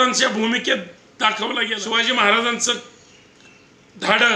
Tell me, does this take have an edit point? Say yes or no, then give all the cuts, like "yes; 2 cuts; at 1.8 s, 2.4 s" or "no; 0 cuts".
yes; 1 cut; at 1.8 s